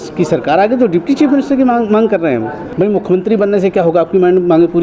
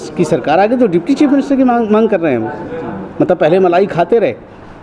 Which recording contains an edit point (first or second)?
first